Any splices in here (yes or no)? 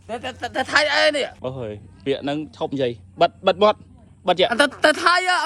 yes